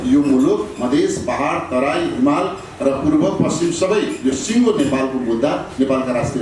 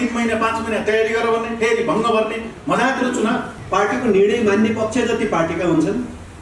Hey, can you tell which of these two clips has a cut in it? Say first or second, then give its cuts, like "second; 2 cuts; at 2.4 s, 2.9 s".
second; 1 cut; at 3.6 s